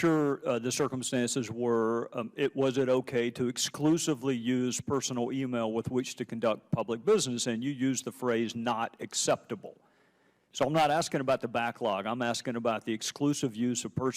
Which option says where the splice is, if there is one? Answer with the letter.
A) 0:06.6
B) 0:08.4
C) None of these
B